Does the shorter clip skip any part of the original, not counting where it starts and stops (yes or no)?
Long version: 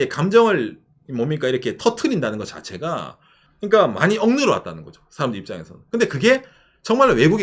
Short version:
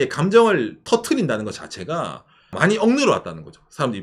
yes